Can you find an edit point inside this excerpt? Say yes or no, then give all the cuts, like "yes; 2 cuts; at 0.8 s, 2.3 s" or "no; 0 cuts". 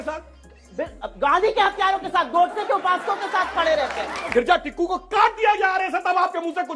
yes; 1 cut; at 4.2 s